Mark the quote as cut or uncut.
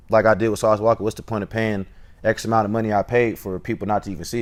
uncut